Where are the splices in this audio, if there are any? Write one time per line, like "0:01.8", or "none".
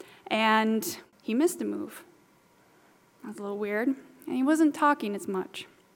0:01.0